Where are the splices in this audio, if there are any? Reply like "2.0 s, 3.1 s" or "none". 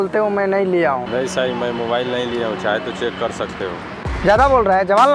4.0 s